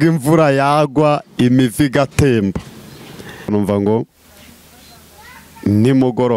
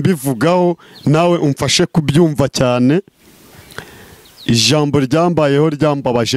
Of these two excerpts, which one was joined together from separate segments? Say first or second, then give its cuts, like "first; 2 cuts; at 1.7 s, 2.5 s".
first; 1 cut; at 3.5 s